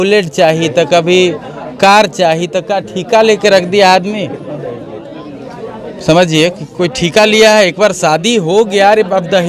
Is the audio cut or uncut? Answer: uncut